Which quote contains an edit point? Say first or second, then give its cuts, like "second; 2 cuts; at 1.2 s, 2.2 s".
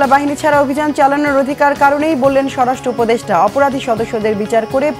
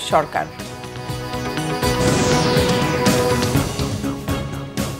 second; 1 cut; at 4.1 s